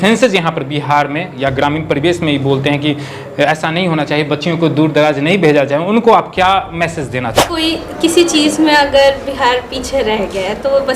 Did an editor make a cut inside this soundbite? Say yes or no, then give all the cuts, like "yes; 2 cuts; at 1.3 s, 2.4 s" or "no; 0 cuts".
yes; 1 cut; at 7.5 s